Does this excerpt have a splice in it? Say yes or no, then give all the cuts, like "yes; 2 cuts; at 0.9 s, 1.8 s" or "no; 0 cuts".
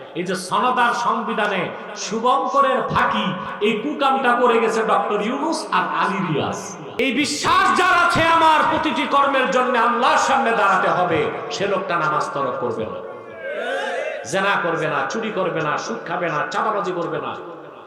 yes; 1 cut; at 7.0 s